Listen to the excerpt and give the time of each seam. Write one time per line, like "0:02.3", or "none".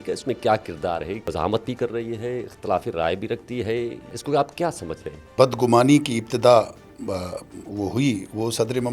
0:01.2
0:04.2
0:05.3